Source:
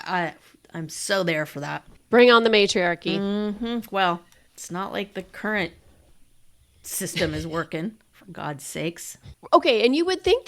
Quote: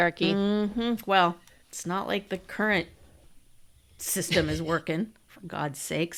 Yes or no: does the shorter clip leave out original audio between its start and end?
no